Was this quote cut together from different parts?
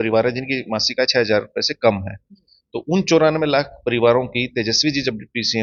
no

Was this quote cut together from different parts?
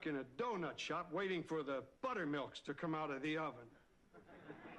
yes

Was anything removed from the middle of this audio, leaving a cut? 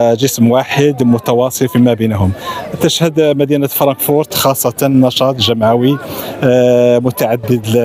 no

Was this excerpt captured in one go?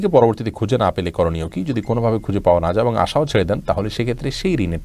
yes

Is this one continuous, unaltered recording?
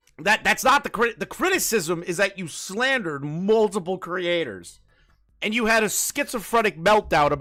yes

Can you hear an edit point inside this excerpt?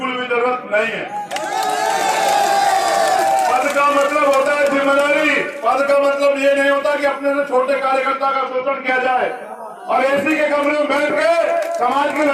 no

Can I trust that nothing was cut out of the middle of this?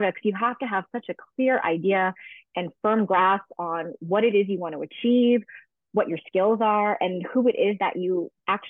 yes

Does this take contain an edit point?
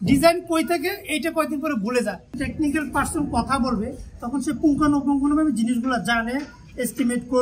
yes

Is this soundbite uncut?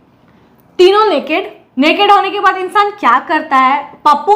no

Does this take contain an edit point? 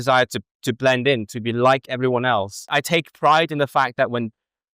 yes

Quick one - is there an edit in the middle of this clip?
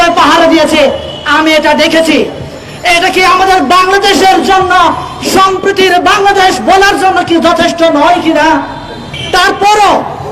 no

